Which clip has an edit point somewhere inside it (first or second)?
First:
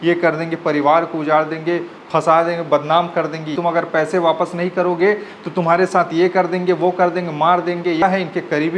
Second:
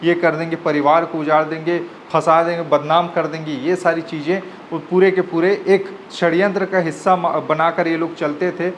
first